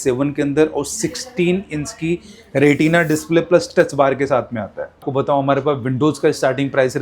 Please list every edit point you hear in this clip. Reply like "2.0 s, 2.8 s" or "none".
5.0 s